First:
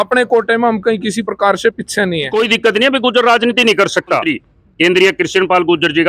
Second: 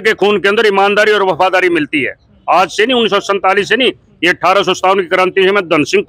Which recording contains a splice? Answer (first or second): first